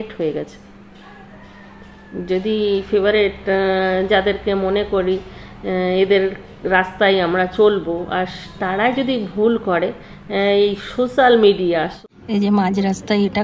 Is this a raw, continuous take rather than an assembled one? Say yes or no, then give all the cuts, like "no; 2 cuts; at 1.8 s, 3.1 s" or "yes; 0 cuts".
no; 1 cut; at 12.0 s